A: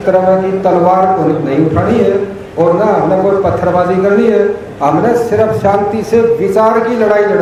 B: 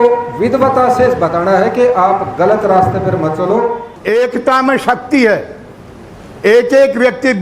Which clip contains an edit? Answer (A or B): B